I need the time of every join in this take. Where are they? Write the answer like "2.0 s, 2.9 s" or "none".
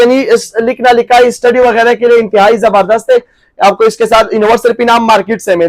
none